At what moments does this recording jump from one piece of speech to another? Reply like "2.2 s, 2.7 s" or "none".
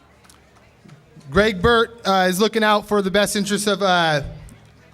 3.2 s